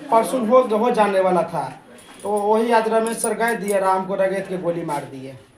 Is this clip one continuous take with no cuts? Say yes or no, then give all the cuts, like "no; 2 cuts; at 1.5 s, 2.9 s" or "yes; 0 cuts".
yes; 0 cuts